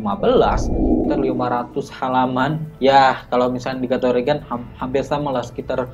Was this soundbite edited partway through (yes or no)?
yes